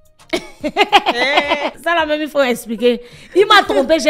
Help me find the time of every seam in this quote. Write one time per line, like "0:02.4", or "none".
0:01.7